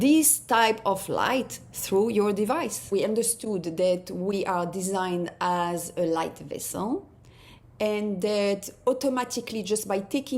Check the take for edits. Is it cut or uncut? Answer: cut